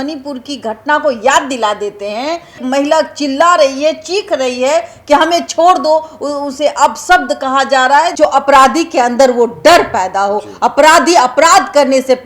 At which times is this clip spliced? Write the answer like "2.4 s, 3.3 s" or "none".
2.6 s, 8.1 s

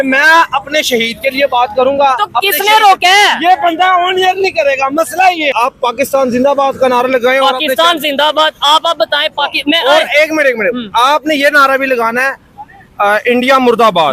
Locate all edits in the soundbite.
5.5 s

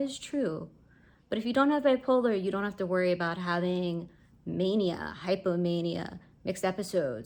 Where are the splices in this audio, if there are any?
none

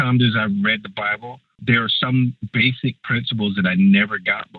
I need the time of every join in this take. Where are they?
1.6 s, 2.4 s

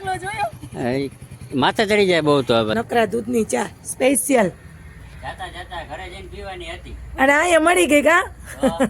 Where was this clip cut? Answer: 2.7 s

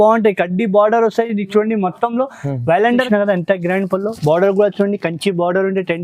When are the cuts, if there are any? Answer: 3.1 s

